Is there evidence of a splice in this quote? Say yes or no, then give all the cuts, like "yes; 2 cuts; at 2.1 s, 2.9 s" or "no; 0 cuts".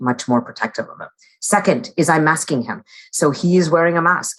no; 0 cuts